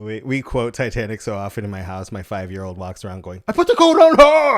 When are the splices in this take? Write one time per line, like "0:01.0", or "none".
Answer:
none